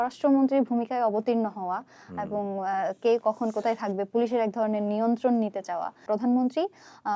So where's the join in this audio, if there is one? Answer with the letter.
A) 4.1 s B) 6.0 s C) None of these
B